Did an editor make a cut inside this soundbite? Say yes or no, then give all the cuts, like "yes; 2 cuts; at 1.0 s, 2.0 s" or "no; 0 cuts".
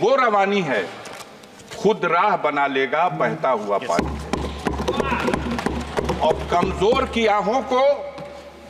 no; 0 cuts